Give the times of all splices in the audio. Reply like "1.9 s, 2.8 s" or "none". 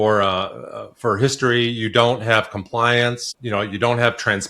3.3 s